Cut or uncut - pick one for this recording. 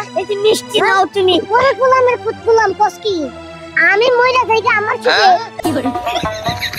cut